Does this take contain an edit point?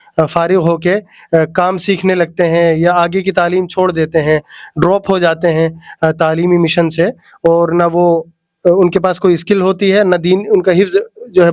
no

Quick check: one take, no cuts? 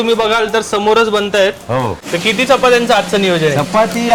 yes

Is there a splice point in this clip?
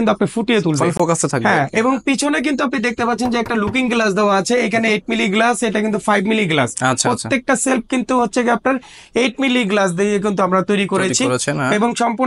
no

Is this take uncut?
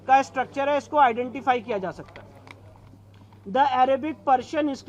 yes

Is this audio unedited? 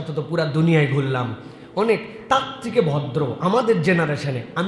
yes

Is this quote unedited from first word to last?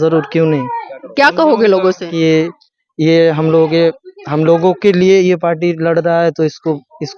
no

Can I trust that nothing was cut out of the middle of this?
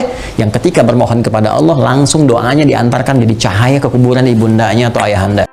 yes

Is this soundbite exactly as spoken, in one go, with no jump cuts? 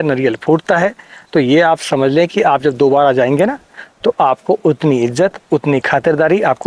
yes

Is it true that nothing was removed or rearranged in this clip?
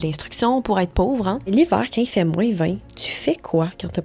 no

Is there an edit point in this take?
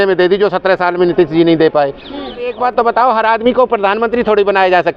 yes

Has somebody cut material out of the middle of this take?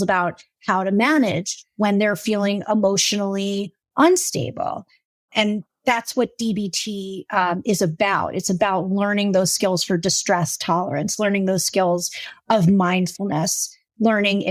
no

